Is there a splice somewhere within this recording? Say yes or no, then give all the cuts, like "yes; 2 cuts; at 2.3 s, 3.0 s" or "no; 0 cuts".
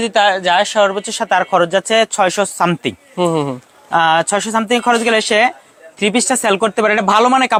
no; 0 cuts